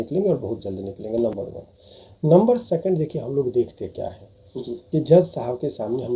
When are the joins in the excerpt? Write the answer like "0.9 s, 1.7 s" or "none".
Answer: none

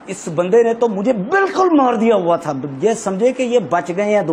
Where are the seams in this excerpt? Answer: none

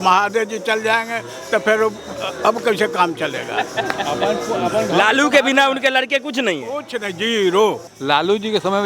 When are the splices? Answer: 7.9 s

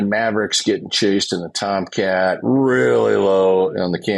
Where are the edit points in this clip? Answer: none

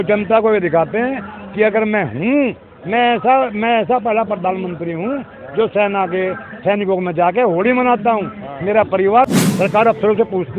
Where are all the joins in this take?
9.3 s

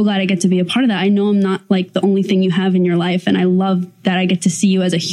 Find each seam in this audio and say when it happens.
none

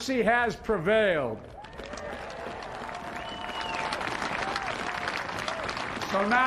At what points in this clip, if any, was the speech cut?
3.2 s

